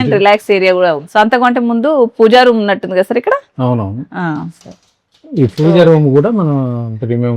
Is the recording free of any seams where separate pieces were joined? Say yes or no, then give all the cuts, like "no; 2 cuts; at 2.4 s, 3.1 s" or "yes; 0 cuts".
no; 1 cut; at 1.0 s